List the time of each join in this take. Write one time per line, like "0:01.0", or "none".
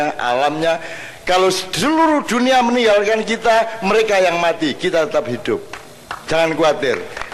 none

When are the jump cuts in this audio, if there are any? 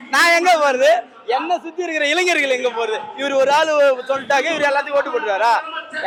none

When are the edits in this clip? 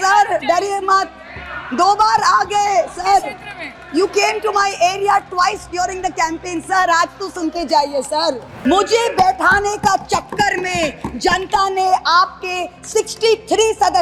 0:08.5

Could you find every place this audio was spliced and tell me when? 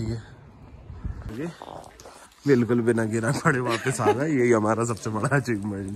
0:01.3

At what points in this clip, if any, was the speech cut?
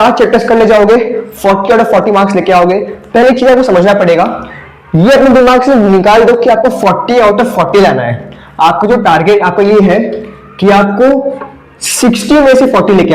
none

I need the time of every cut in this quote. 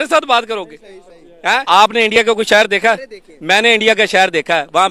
0:01.6

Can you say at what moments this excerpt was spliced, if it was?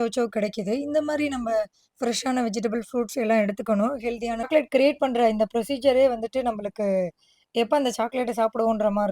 0:04.5

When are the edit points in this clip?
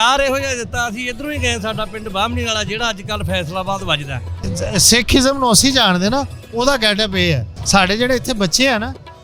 0:04.5
0:07.5

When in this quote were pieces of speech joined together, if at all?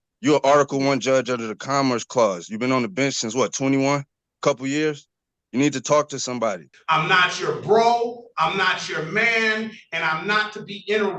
0:06.7

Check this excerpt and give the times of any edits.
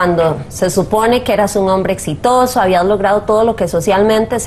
none

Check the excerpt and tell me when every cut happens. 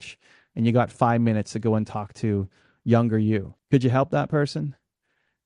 0:03.5

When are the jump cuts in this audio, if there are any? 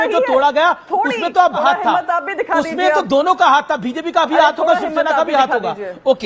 0:01.6

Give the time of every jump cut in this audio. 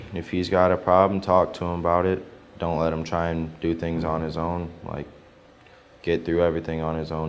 none

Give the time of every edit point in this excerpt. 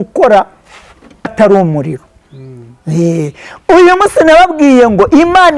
0:01.3

